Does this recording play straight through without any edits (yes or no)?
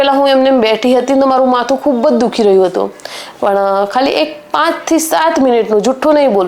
yes